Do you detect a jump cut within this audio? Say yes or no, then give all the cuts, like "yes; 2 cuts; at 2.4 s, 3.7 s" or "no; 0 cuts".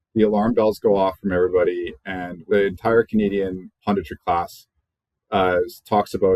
yes; 1 cut; at 2.3 s